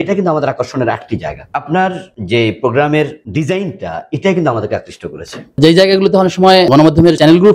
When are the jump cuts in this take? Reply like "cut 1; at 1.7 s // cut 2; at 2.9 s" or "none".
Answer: cut 1; at 1.4 s // cut 2; at 2.1 s // cut 3; at 3.2 s // cut 4; at 5.6 s // cut 5; at 6.8 s